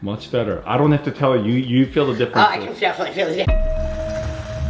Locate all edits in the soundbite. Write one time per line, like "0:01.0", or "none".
0:03.6